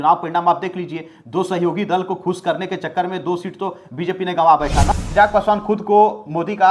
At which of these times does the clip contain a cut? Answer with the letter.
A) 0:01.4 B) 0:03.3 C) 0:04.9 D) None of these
C